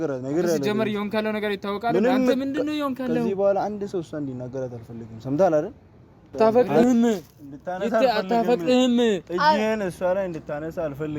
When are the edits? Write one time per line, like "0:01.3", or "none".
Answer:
0:06.3